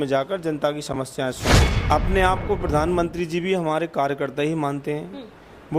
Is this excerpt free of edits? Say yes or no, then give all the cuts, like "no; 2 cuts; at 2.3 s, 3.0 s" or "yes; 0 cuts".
no; 1 cut; at 1.7 s